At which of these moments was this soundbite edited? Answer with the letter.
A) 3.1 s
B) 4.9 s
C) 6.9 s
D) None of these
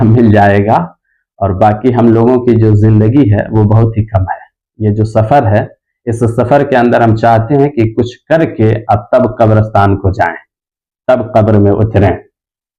D